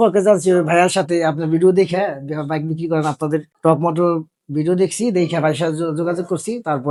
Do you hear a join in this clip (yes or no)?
no